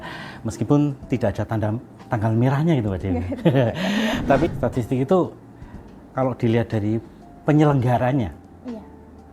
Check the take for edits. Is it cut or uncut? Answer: cut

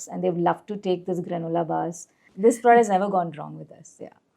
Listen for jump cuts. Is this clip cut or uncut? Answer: cut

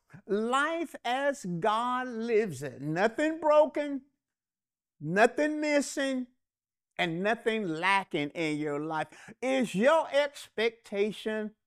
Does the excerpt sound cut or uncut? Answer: cut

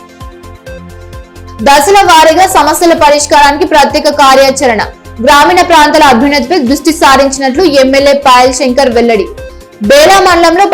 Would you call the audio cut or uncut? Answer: cut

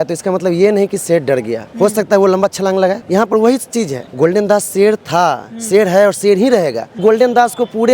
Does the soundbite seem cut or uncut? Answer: cut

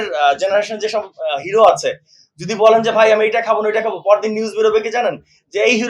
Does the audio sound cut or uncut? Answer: uncut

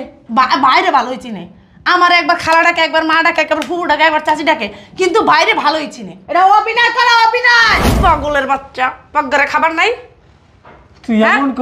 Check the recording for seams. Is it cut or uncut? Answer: cut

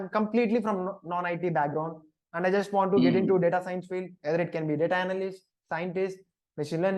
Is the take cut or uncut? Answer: uncut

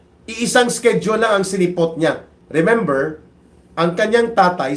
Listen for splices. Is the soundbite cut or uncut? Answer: cut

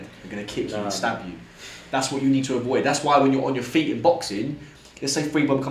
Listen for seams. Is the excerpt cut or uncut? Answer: uncut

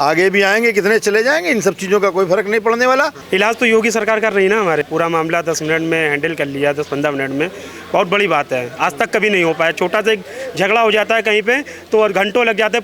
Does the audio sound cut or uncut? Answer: cut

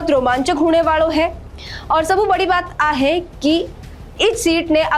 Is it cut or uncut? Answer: uncut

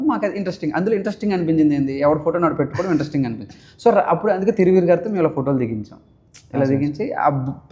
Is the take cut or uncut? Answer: uncut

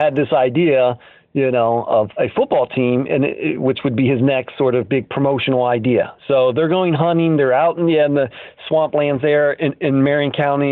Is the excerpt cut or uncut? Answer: cut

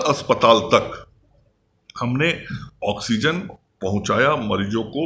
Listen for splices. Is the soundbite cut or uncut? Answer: uncut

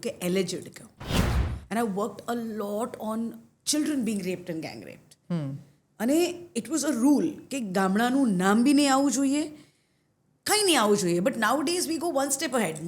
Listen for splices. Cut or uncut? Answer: cut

